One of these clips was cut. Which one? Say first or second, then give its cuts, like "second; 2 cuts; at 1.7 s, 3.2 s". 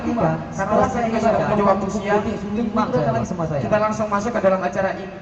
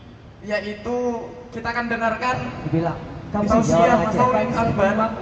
second; 2 cuts; at 0.8 s, 4.2 s